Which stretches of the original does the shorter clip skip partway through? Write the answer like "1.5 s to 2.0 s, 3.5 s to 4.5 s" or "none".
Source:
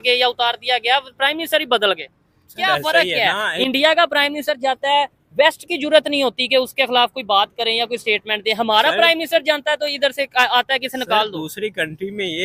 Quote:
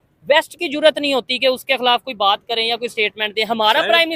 none